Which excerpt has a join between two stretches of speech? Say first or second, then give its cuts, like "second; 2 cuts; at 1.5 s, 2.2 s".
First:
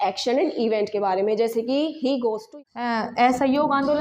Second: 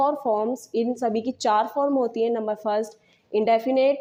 first; 1 cut; at 2.4 s